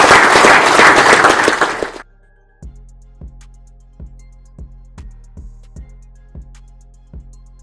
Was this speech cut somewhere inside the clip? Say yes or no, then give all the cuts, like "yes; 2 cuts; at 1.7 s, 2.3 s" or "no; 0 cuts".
yes; 1 cut; at 2.6 s